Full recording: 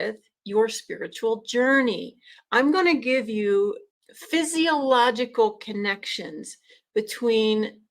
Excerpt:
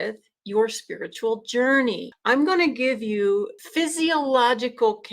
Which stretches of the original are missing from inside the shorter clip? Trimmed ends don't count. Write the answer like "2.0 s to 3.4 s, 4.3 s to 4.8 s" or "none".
2.1 s to 2.4 s, 3.9 s to 4.2 s